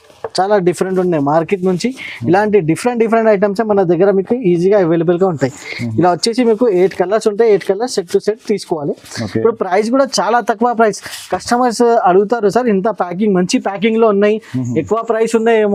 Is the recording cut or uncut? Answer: uncut